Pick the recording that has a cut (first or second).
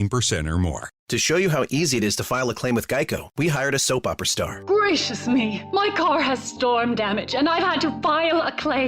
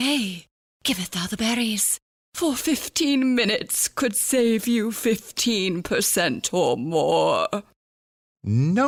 first